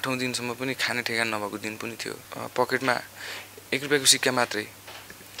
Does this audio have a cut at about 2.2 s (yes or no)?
yes